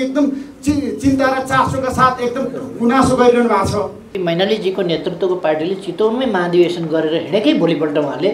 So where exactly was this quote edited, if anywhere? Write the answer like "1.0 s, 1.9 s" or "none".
4.1 s